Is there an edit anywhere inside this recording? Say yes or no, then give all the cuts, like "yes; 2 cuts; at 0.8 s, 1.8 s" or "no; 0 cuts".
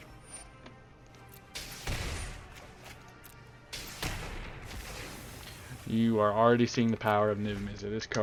no; 0 cuts